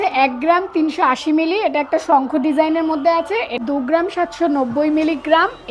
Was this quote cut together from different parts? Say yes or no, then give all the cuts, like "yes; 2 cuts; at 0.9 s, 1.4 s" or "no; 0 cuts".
yes; 1 cut; at 3.6 s